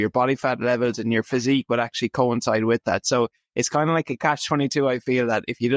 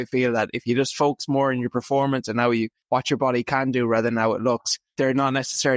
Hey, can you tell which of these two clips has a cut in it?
second; 2 cuts; at 2.8 s, 4.8 s

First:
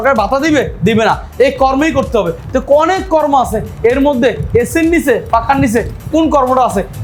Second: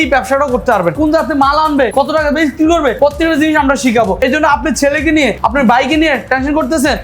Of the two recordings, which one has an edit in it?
second; 5 cuts; at 0.9 s, 1.9 s, 2.9 s, 4.2 s, 5.4 s

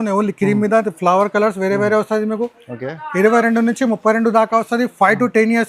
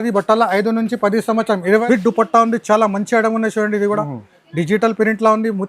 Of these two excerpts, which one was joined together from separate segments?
second; 1 cut; at 1.8 s

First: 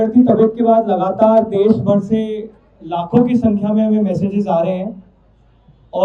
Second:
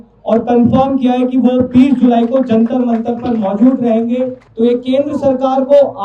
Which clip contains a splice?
second; 1 cut; at 4.4 s

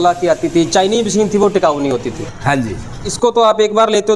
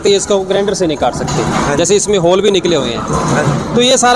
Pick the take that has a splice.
first; 1 cut; at 3.0 s

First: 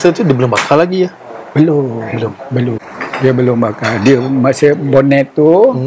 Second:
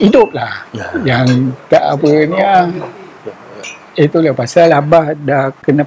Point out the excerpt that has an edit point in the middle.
first; 1 cut; at 2.9 s

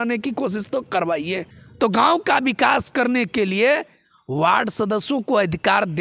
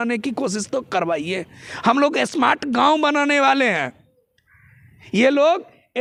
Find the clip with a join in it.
first; 1 cut; at 1.6 s

